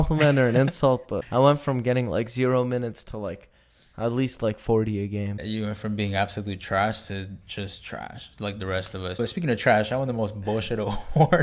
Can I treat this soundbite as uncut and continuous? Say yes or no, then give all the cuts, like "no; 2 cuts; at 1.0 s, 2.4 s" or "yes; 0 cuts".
yes; 0 cuts